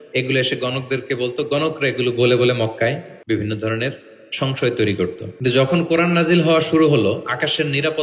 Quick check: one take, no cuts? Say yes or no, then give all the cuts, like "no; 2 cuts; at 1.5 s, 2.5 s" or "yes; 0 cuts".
no; 2 cuts; at 3.1 s, 5.2 s